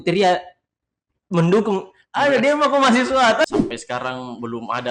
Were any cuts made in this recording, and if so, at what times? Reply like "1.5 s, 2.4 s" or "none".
3.4 s